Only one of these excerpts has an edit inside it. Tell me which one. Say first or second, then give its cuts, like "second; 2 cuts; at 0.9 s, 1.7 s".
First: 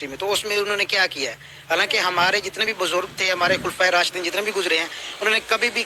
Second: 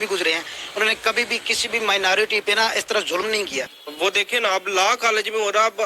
second; 1 cut; at 3.8 s